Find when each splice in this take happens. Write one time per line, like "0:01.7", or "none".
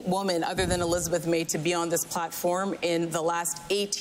none